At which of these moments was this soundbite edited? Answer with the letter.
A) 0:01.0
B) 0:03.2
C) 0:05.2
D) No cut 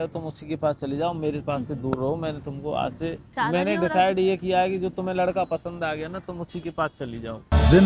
B